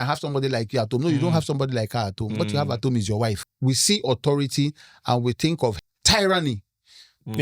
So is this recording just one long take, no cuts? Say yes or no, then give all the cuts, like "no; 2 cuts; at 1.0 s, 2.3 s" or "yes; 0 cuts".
no; 2 cuts; at 3.5 s, 5.8 s